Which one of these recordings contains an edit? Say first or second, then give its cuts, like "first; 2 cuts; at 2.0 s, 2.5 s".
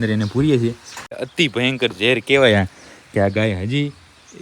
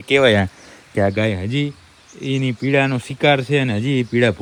first; 1 cut; at 1.2 s